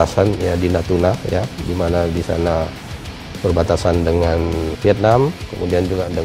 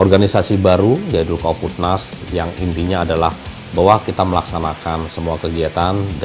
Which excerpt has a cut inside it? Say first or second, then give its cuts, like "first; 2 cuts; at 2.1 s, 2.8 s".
first; 1 cut; at 4.8 s